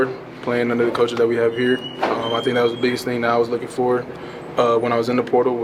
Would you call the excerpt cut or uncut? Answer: uncut